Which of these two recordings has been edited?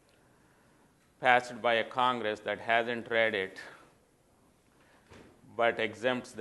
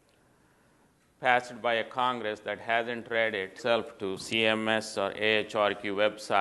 first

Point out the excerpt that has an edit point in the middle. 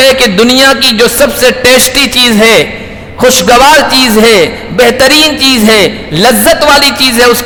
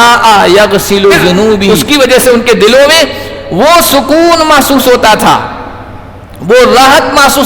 second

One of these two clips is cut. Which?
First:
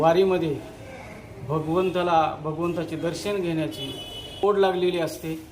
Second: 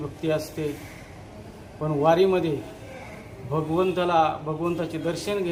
first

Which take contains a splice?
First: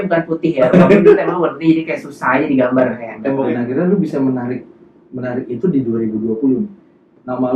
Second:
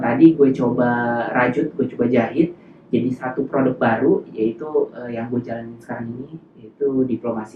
first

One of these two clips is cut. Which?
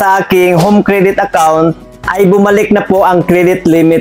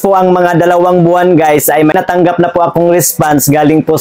second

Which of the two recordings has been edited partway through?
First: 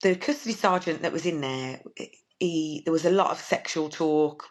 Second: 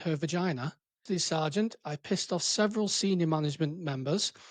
second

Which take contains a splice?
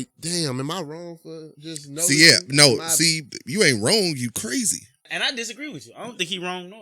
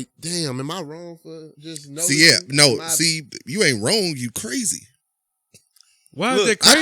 first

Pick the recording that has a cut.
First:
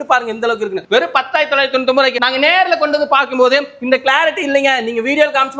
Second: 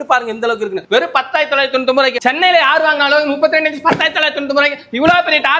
second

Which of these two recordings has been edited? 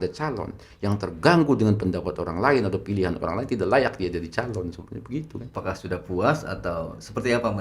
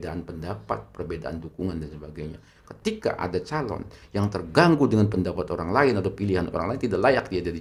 first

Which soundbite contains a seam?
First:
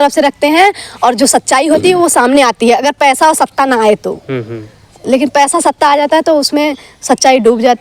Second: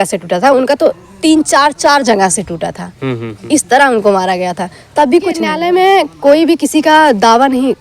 second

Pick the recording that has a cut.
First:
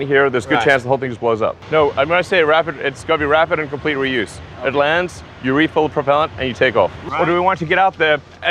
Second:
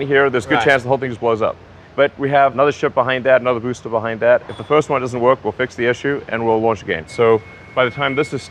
first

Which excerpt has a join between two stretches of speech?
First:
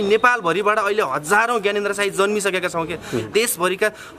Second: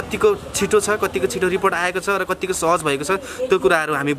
first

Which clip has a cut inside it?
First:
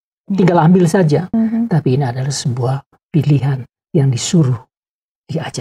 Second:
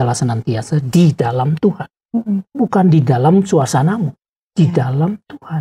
first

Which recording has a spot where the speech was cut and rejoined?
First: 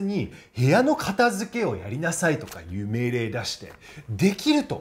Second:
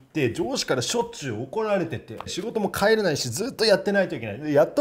second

